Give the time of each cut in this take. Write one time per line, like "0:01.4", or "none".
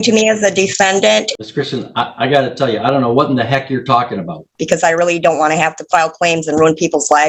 0:01.3
0:04.6